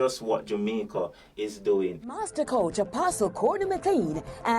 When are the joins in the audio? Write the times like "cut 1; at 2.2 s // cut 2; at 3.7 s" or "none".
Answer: cut 1; at 2.1 s